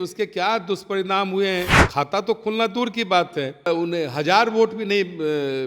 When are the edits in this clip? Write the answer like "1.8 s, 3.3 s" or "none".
1.8 s, 3.7 s